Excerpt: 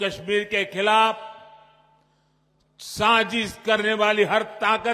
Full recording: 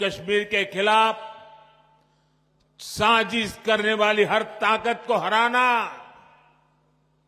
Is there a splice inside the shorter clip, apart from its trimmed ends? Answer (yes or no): no